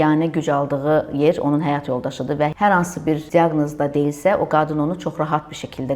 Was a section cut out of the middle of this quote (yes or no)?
yes